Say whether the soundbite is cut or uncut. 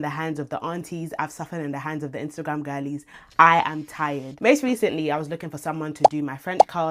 uncut